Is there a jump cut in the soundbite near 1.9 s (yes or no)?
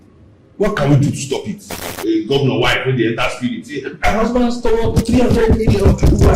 yes